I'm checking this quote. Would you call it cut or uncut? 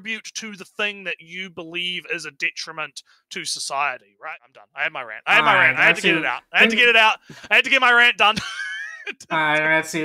cut